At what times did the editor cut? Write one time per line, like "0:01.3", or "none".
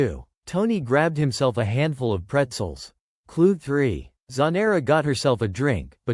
none